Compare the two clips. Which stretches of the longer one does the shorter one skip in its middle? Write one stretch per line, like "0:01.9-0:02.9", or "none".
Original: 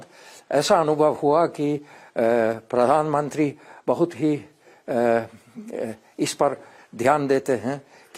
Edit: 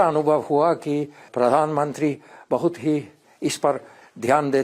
0:02.0-0:02.6
0:04.6-0:06.0